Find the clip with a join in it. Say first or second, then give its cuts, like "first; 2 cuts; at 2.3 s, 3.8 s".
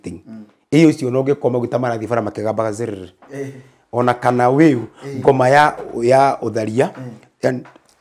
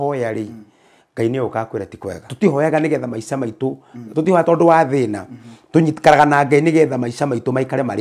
second; 1 cut; at 2.2 s